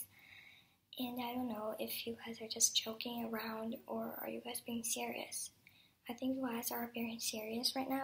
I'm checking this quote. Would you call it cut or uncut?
cut